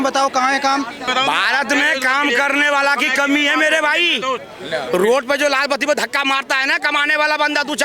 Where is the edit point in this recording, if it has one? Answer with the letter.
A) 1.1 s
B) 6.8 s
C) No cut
A